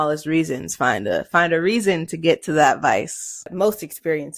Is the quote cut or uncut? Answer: cut